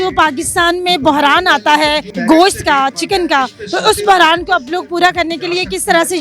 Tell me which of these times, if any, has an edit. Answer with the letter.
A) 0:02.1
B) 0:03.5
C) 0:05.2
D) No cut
A